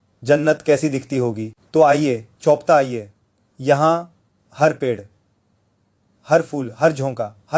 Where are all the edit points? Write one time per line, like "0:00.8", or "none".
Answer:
none